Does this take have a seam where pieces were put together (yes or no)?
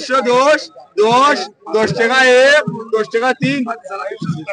no